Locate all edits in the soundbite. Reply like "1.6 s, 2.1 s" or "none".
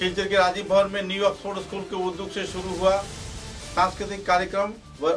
none

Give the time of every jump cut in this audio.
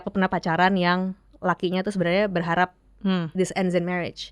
none

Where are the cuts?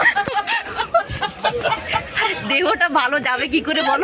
none

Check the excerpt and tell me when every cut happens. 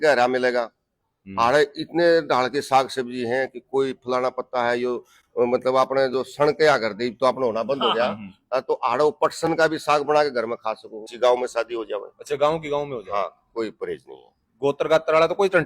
11.0 s

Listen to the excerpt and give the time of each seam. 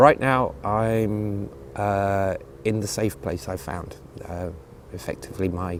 none

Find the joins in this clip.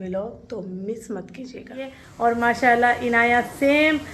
2.1 s

